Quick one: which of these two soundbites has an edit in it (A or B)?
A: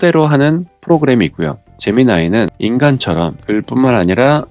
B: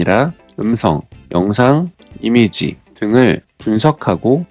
A